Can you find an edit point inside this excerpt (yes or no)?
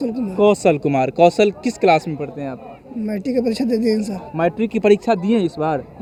no